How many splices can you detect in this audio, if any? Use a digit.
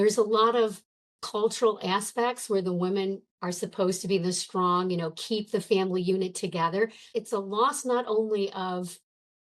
1